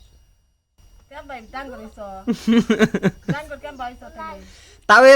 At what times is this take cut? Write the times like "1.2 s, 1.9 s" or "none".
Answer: 0.9 s